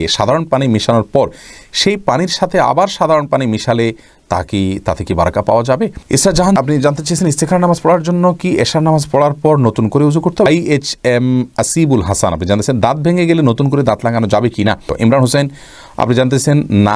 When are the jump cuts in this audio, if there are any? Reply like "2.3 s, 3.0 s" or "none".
6.0 s, 10.5 s, 14.9 s